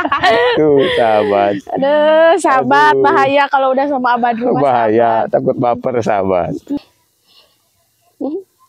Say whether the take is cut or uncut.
cut